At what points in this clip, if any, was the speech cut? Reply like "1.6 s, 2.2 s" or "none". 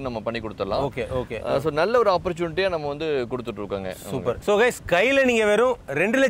none